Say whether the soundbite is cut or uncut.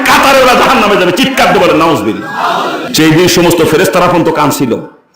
cut